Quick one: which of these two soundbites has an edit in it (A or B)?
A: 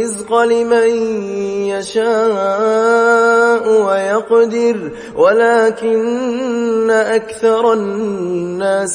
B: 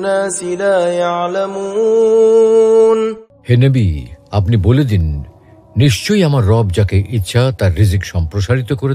B